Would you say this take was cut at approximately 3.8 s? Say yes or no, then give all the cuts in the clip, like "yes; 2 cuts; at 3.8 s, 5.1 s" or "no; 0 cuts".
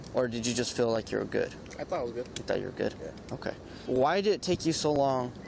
yes; 1 cut; at 3.8 s